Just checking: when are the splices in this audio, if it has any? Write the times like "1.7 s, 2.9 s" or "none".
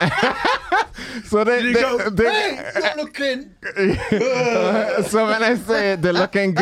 none